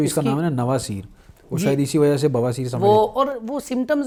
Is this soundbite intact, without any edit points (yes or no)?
yes